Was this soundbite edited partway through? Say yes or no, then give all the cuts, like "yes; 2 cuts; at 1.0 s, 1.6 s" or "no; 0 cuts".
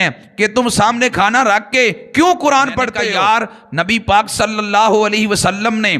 yes; 1 cut; at 3.0 s